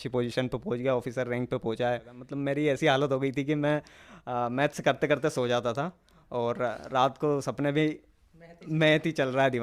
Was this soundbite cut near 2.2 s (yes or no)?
yes